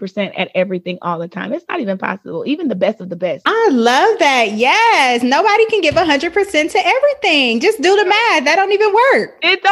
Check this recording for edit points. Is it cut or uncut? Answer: uncut